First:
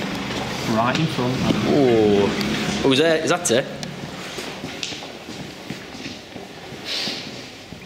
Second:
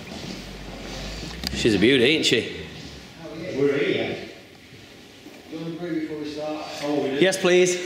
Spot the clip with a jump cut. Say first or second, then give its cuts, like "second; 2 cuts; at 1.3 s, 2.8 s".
second; 1 cut; at 5.3 s